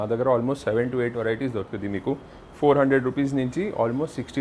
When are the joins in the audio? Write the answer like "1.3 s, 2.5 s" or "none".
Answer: none